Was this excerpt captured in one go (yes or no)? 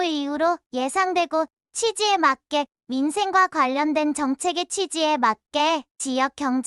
yes